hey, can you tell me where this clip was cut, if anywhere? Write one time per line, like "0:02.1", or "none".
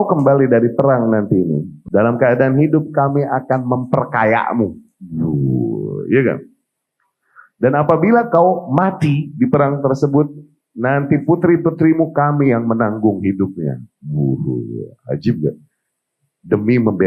0:01.7